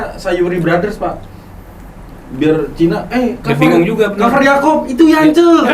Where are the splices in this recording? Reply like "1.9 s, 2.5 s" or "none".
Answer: none